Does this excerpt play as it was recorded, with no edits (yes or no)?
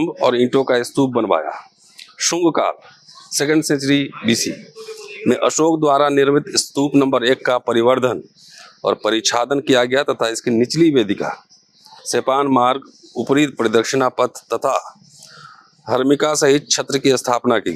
yes